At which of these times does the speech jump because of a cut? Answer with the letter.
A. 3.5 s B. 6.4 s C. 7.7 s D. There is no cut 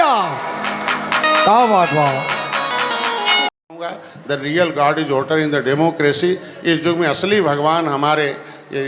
A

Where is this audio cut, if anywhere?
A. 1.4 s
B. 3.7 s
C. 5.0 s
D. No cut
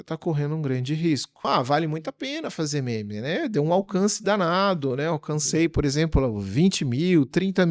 A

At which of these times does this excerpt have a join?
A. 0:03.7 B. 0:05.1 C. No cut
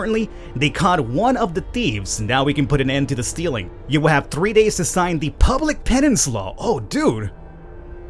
A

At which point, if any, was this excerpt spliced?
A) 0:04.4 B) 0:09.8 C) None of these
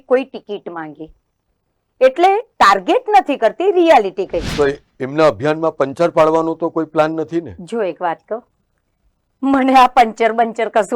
A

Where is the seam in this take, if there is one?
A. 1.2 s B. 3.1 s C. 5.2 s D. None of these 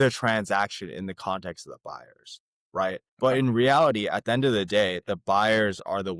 B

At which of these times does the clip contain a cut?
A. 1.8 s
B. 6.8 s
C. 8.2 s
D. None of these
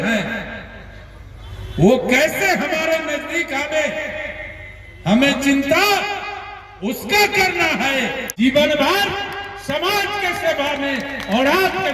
C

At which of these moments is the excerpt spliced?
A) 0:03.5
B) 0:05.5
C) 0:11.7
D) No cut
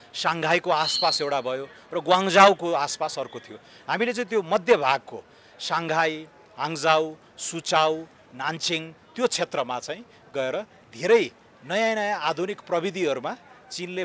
D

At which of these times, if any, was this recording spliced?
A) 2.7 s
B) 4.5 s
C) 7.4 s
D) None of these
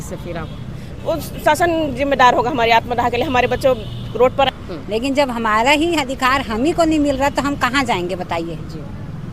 B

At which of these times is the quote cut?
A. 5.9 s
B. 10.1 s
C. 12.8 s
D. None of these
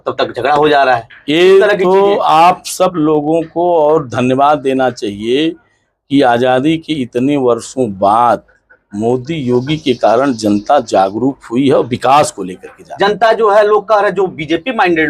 C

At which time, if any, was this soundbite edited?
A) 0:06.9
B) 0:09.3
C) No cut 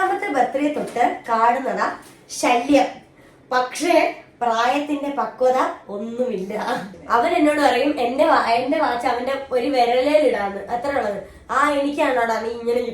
A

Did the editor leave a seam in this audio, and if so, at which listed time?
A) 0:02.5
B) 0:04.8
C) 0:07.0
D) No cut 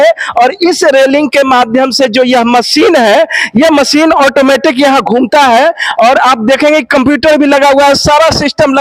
D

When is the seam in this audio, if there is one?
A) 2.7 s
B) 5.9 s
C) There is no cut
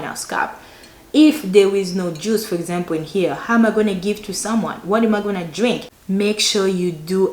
B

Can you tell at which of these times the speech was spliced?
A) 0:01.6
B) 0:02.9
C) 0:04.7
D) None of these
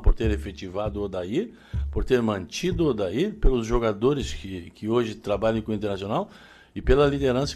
D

